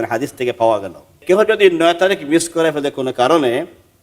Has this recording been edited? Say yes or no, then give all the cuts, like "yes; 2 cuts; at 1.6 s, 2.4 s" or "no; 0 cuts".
yes; 1 cut; at 1.1 s